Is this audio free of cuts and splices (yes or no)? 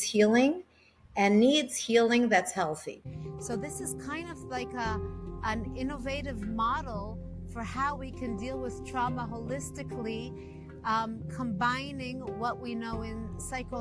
no